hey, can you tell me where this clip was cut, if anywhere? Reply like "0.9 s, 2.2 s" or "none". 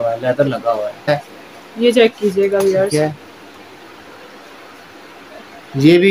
1.1 s